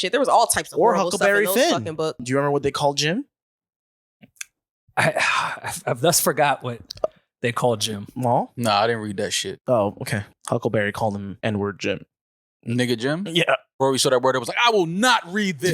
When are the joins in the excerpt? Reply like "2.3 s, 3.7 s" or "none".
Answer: 2.2 s, 8.5 s, 10.2 s, 11.3 s, 13.8 s